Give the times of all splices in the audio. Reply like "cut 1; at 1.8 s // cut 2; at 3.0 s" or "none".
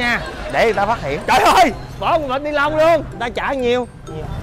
cut 1; at 3.2 s